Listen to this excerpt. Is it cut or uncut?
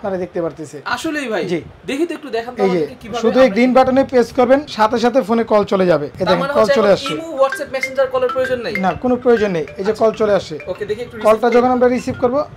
cut